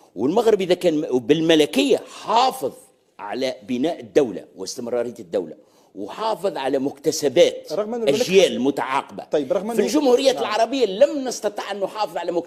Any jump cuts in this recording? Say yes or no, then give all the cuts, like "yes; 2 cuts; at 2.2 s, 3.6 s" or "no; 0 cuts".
no; 0 cuts